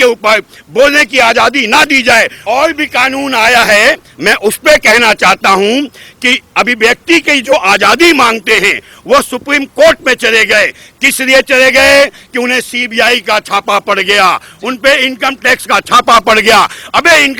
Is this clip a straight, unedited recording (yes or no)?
no